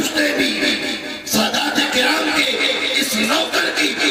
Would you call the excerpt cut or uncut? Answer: uncut